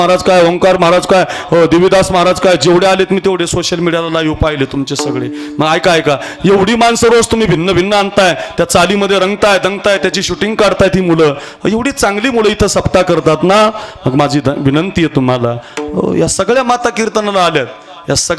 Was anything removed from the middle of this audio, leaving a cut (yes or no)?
no